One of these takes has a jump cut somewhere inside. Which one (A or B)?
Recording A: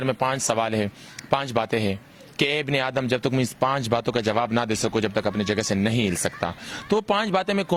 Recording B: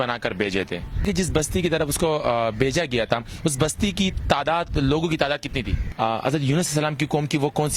B